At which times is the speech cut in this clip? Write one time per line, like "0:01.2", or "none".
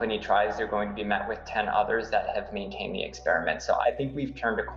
0:03.8